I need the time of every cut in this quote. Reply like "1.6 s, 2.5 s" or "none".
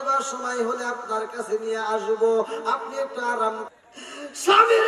3.7 s

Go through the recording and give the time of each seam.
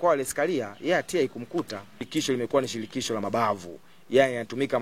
2.0 s

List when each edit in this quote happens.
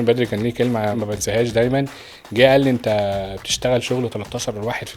1.0 s

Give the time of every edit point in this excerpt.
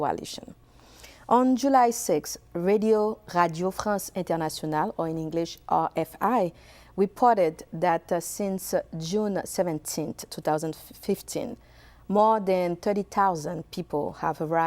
1.3 s

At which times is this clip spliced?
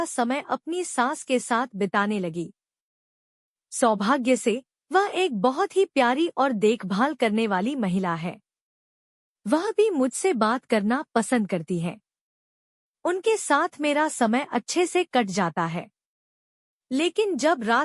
none

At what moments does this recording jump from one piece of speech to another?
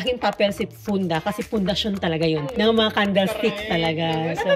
2.5 s

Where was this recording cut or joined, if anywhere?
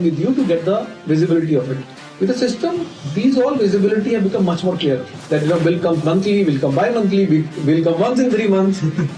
5.1 s

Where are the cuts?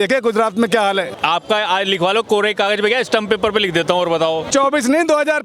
1.1 s, 4.5 s

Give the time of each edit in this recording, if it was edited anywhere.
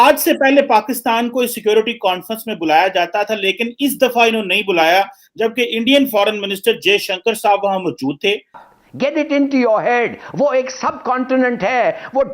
8.6 s

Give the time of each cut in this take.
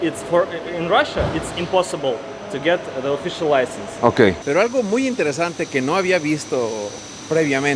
4.4 s

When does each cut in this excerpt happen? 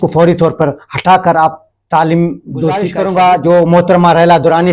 2.9 s

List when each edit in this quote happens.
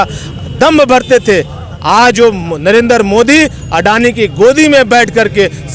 none

